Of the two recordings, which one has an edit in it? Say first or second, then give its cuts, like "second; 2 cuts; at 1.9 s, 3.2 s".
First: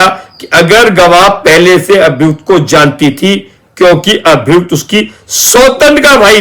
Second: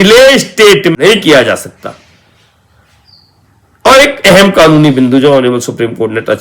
second; 1 cut; at 0.9 s